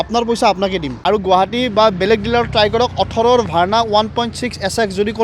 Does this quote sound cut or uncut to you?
cut